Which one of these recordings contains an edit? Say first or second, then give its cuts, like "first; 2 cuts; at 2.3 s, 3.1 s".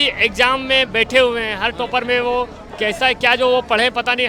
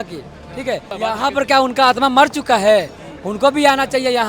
second; 1 cut; at 0.9 s